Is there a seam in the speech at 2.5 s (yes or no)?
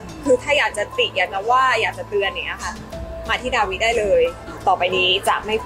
no